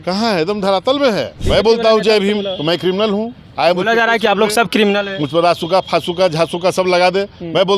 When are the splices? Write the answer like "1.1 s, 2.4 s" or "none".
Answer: 1.4 s